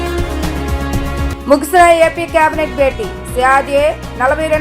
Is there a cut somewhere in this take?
yes; 1 cut; at 1.3 s

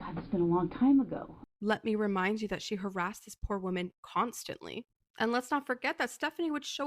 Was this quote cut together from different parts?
yes; 1 cut; at 1.4 s

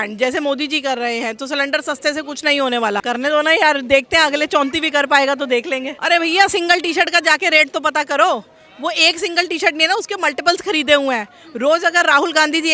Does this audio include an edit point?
yes; 2 cuts; at 3.0 s, 5.9 s

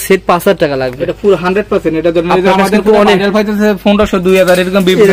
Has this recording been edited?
no; 0 cuts

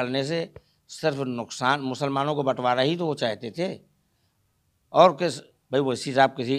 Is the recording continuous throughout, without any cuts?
yes; 0 cuts

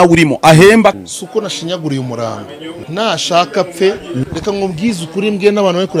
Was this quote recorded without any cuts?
no; 3 cuts; at 0.9 s, 2.7 s, 4.2 s

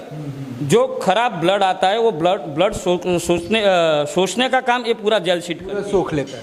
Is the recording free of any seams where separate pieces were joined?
yes; 0 cuts

